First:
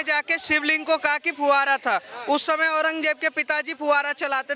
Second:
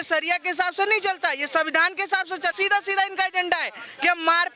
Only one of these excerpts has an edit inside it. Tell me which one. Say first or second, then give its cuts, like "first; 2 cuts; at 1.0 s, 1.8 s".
second; 1 cut; at 2.5 s